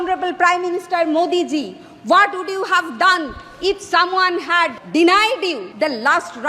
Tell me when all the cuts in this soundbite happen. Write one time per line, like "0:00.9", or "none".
0:04.8
0:05.7